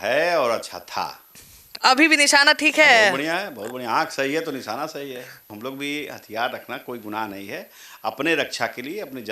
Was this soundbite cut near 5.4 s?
yes; 1 cut; at 5.4 s

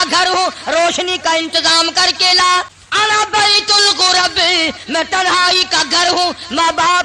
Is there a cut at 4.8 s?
no; 1 cut; at 2.8 s

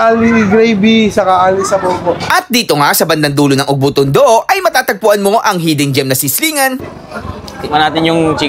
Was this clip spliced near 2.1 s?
yes; 1 cut; at 2.1 s

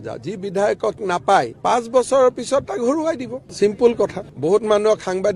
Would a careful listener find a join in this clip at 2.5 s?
no; 2 cuts; at 1.0 s, 4.2 s

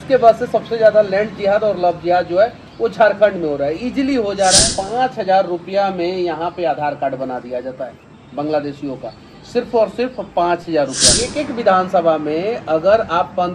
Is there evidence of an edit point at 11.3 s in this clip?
yes; 2 cuts; at 4.8 s, 11.3 s

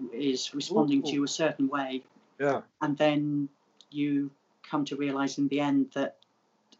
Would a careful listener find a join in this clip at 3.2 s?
no; 0 cuts

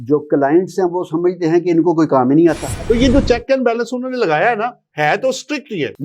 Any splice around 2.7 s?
yes; 1 cut; at 2.7 s

